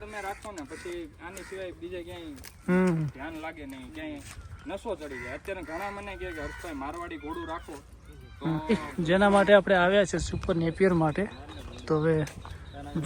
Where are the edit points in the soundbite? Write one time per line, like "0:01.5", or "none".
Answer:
0:08.9